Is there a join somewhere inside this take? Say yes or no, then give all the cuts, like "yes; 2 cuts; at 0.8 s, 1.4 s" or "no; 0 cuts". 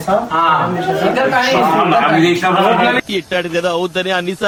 no; 0 cuts